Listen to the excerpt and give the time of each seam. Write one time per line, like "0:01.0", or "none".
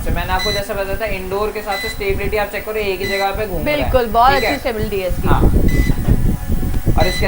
none